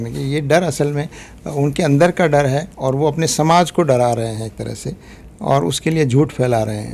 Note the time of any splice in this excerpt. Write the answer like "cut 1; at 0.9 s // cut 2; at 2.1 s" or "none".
none